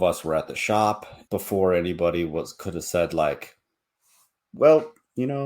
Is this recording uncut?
no; 1 cut; at 1.1 s

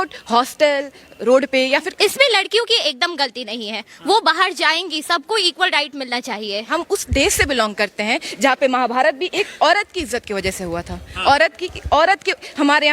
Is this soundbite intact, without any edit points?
no; 2 cuts; at 1.9 s, 6.7 s

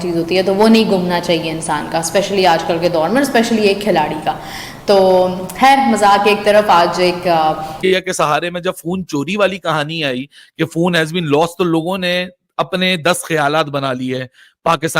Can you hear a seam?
yes; 1 cut; at 7.8 s

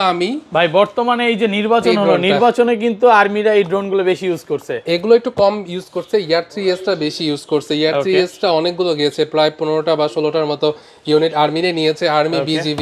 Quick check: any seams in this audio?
no; 0 cuts

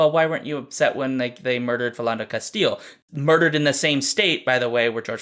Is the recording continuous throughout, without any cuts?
no; 1 cut; at 3.0 s

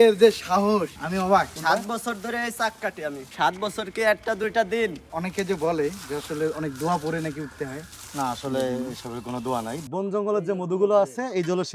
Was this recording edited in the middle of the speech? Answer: yes; 3 cuts; at 1.4 s, 5.0 s, 9.8 s

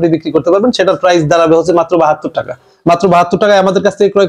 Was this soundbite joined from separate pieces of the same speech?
no; 0 cuts

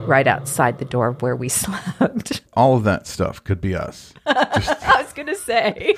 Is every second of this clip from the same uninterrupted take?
yes; 0 cuts

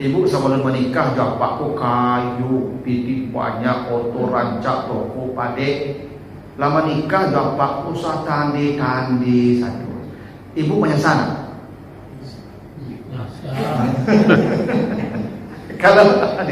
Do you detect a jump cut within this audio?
no; 0 cuts

